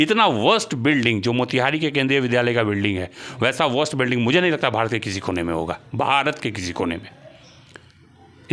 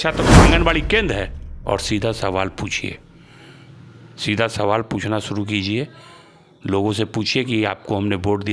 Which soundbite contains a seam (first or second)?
second